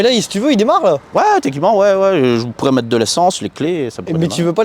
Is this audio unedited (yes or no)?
yes